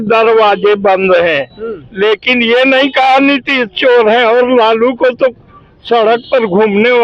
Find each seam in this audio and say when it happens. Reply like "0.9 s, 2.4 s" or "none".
none